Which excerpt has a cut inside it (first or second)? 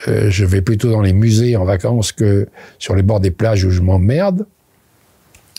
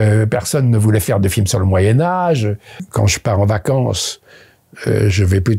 second